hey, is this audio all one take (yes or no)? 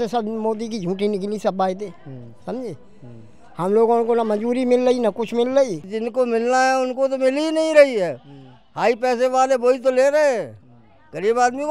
no